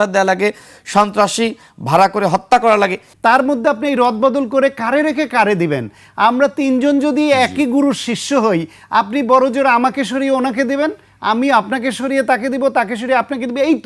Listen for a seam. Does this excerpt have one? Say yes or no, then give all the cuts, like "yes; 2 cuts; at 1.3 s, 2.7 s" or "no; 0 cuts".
yes; 1 cut; at 3.1 s